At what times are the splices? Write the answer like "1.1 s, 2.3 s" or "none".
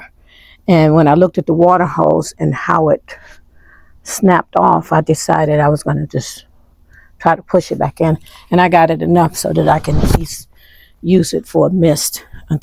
none